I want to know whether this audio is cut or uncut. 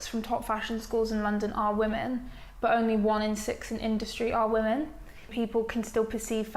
cut